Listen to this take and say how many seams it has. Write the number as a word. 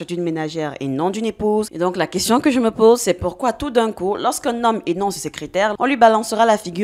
two